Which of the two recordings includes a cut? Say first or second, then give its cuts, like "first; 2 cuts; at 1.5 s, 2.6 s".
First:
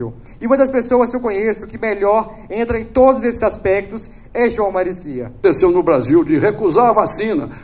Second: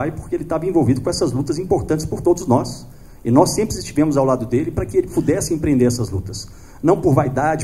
first; 1 cut; at 5.4 s